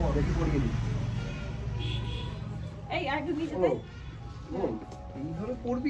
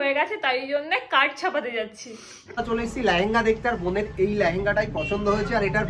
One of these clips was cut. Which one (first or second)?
second